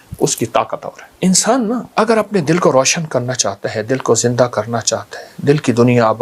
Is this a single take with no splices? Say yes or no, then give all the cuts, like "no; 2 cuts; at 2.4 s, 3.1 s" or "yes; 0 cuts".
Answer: no; 2 cuts; at 1.0 s, 1.9 s